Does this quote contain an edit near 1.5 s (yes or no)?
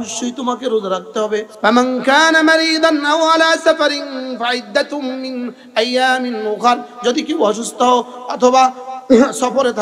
yes